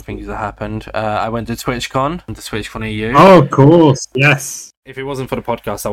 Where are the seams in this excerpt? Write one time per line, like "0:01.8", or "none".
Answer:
0:04.7